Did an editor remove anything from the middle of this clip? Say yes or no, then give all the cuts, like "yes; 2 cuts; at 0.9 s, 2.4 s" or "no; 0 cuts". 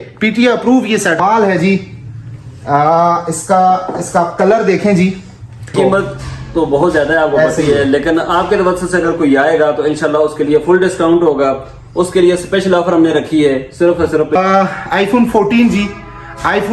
yes; 3 cuts; at 1.2 s, 5.7 s, 14.4 s